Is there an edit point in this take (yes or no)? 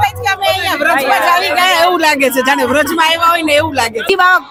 no